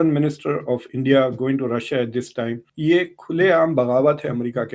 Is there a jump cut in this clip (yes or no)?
yes